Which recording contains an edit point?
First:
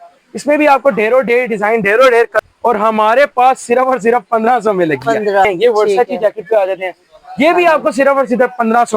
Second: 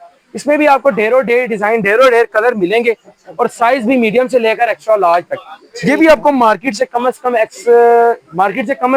first; 2 cuts; at 2.4 s, 5.5 s

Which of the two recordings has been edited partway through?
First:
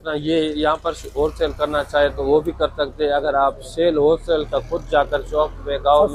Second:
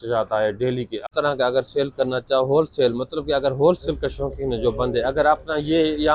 second; 1 cut; at 1.0 s

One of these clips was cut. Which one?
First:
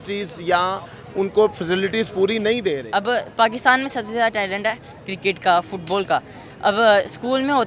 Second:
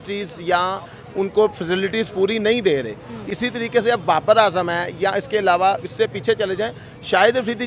first; 1 cut; at 2.8 s

